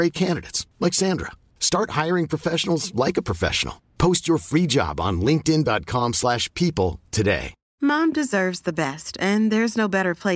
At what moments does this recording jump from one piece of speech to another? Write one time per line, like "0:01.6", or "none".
0:07.6